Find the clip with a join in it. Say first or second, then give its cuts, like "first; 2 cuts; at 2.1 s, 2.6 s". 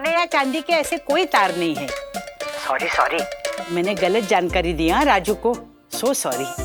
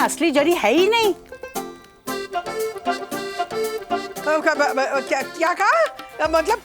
second; 2 cuts; at 1.2 s, 4.2 s